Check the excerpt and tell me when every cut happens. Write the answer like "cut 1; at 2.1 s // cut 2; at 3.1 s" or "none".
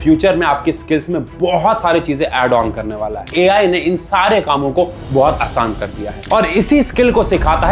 cut 1; at 3.3 s